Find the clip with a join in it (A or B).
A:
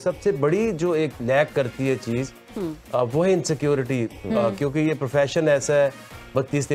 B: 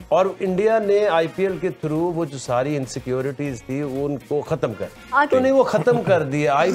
B